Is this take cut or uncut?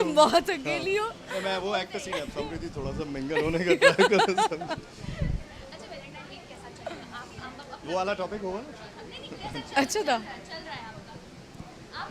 uncut